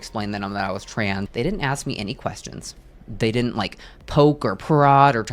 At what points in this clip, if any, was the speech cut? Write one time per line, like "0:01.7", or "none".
0:01.3